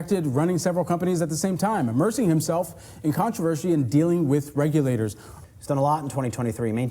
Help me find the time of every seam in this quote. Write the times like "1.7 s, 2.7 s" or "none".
5.3 s